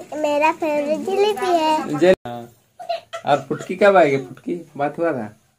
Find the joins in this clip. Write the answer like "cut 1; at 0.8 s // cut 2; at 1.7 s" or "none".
none